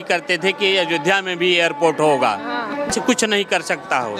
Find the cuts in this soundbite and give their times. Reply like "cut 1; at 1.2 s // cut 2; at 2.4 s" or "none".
cut 1; at 2.9 s